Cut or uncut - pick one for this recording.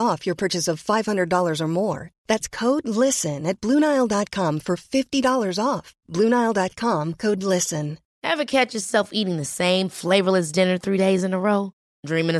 cut